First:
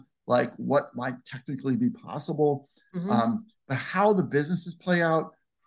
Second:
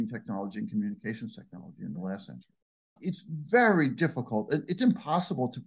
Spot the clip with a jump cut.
second; 1 cut; at 2.9 s

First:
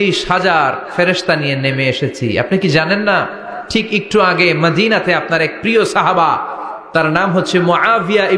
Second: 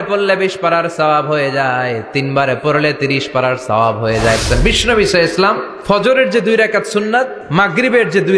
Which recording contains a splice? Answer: second; 3 cuts; at 4.4 s, 5.7 s, 7.4 s

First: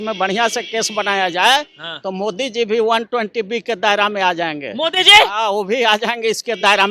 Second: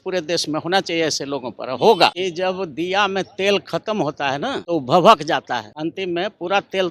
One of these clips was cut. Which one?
second; 3 cuts; at 2.2 s, 4.6 s, 5.7 s

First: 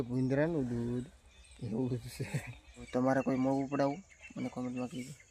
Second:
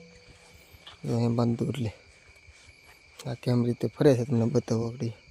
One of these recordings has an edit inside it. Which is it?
first; 1 cut; at 2.8 s

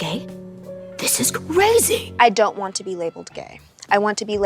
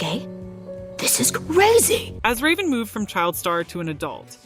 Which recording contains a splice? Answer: first; 1 cut; at 2.1 s

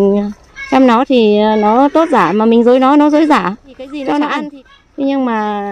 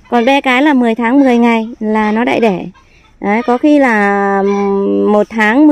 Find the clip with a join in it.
first; 1 cut; at 4.5 s

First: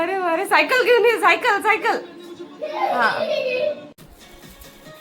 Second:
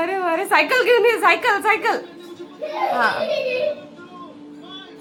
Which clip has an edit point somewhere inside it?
first; 1 cut; at 4.0 s

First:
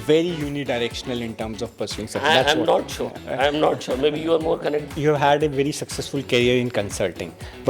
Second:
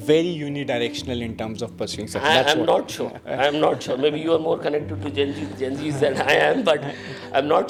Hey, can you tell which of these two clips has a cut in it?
first; 1 cut; at 4.9 s

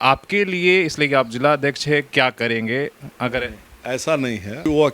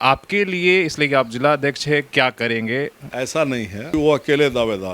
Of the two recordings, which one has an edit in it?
second; 1 cut; at 3.0 s

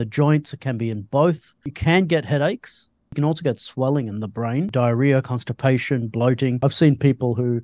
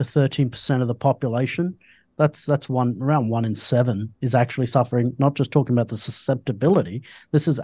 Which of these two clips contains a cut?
first; 4 cuts; at 1.7 s, 3.1 s, 4.7 s, 6.6 s

